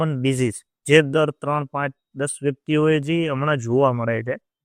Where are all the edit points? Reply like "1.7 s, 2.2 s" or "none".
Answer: none